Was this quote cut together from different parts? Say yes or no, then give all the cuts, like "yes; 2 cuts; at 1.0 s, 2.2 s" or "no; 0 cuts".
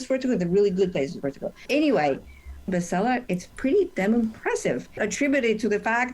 yes; 3 cuts; at 1.5 s, 2.7 s, 5.0 s